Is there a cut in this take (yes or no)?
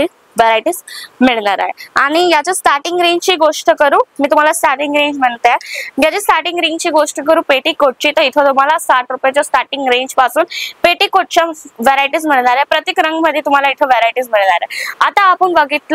no